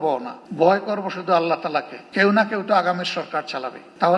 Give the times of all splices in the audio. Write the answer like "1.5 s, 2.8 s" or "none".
2.0 s

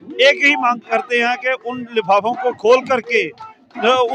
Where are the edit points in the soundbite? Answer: none

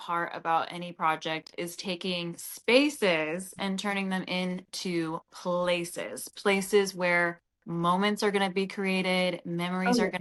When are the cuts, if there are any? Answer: none

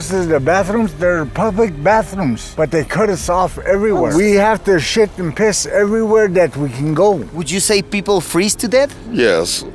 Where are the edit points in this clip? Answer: 4.1 s, 7.3 s

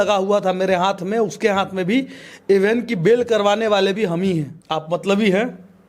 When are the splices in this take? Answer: 4.6 s

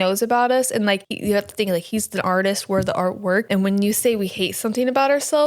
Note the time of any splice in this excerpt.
1.1 s, 3.5 s

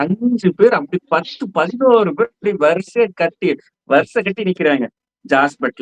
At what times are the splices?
none

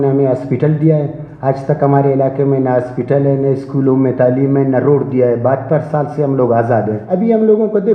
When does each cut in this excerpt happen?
7.0 s

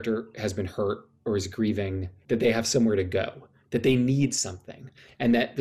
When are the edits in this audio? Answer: 1.1 s, 2.1 s

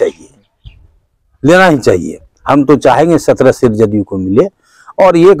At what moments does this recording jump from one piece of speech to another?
none

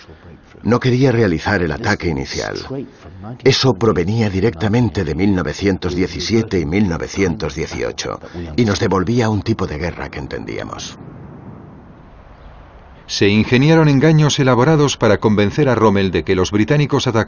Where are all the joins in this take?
13.1 s

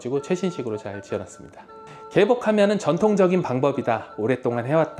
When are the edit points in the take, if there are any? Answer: 1.8 s

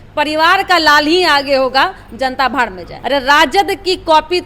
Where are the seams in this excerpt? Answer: 2.9 s

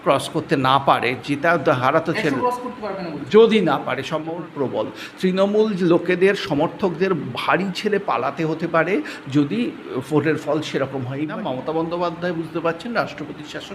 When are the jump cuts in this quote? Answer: 4.3 s, 11.4 s

